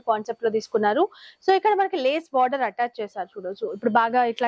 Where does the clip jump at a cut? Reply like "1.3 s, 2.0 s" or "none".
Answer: none